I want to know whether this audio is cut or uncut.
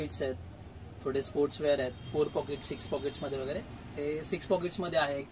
uncut